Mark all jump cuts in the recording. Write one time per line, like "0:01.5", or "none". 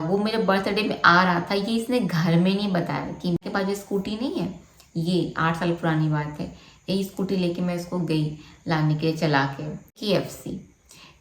0:03.4
0:09.9